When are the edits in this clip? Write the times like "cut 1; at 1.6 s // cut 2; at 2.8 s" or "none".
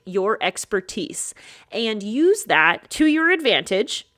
cut 1; at 2.8 s